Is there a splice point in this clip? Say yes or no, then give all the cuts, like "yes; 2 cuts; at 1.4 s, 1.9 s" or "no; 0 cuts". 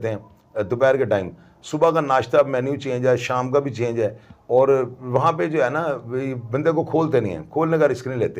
no; 0 cuts